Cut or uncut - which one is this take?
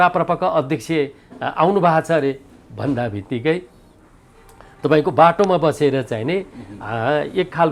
uncut